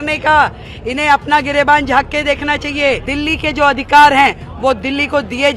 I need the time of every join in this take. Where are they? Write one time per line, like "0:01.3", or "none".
0:03.1